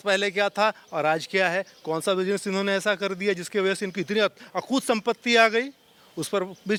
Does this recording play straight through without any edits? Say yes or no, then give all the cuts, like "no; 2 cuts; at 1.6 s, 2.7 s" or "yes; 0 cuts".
yes; 0 cuts